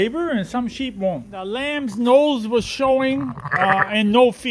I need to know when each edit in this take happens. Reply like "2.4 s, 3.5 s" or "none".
1.7 s